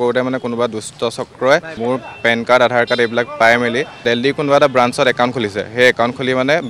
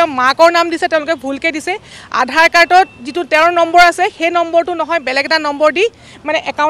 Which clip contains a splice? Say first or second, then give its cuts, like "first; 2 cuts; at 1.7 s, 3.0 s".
first; 2 cuts; at 1.8 s, 3.9 s